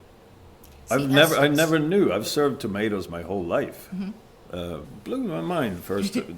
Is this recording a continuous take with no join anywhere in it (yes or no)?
no